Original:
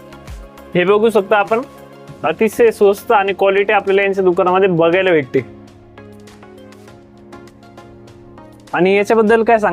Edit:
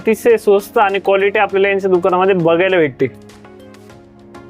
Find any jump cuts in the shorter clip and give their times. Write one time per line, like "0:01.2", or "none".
0:03.1